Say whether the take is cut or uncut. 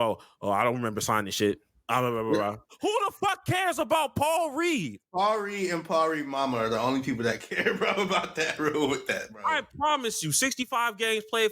cut